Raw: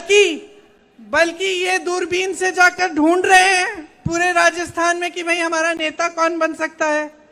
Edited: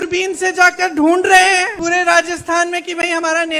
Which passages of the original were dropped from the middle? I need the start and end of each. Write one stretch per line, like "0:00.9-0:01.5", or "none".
0:03.7-0:04.0